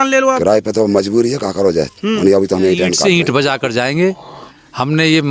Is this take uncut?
no; 1 cut; at 3.0 s

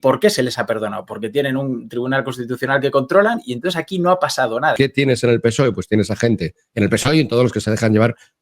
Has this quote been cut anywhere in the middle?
yes; 1 cut; at 4.8 s

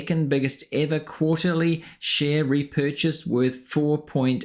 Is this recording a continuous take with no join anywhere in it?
yes; 0 cuts

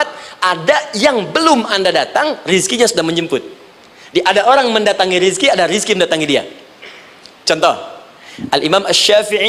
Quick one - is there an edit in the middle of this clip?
no; 0 cuts

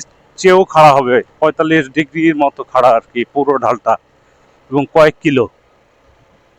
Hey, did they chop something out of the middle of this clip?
no; 0 cuts

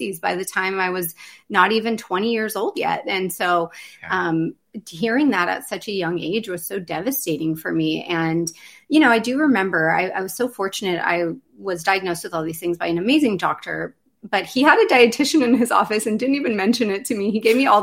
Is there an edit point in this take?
no; 0 cuts

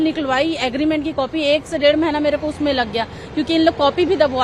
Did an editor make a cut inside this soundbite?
no; 0 cuts

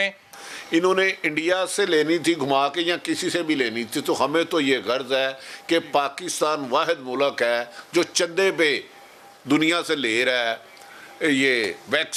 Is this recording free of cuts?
yes; 0 cuts

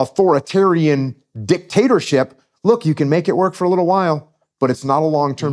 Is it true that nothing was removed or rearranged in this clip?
yes; 0 cuts

